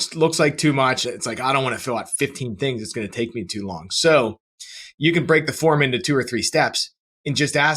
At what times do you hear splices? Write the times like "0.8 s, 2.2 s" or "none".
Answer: 1.0 s